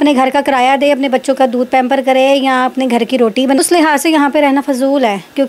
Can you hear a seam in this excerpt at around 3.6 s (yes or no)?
yes